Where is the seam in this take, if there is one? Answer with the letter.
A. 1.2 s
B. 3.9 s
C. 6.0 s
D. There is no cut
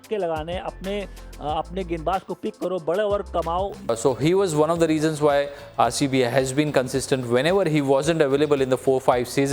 B